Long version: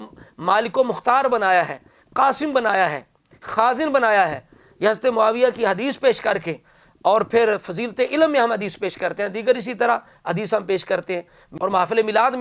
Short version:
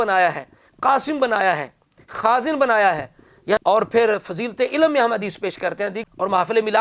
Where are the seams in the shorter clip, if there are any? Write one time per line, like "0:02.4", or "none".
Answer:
0:03.6
0:06.0